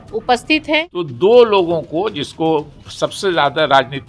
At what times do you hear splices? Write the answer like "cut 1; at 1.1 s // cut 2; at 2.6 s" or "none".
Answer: cut 1; at 1.0 s